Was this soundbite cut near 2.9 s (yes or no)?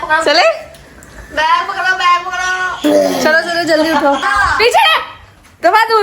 no